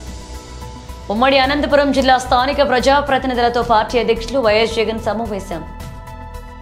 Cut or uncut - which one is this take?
uncut